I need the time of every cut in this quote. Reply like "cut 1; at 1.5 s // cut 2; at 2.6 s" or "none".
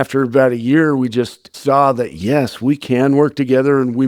cut 1; at 1.4 s